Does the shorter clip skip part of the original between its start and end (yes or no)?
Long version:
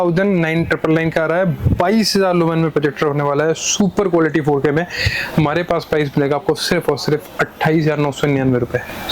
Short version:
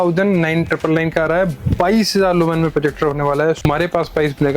yes